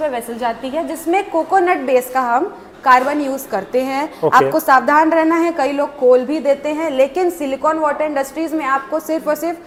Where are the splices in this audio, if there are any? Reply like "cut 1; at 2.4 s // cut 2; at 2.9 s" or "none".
none